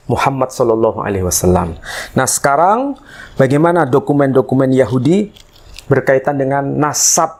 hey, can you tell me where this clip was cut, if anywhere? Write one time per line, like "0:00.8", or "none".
none